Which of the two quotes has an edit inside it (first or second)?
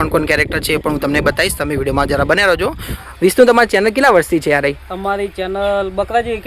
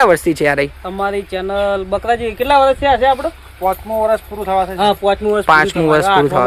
first